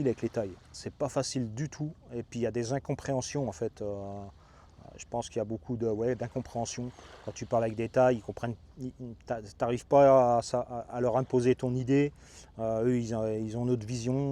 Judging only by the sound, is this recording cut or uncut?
uncut